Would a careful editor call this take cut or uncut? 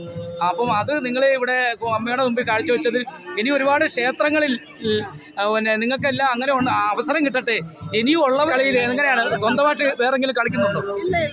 cut